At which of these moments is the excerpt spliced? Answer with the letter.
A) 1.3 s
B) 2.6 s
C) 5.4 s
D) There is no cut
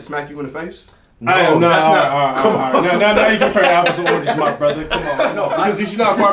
C